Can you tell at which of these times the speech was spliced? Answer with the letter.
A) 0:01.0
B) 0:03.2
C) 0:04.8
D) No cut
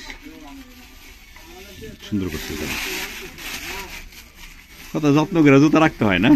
D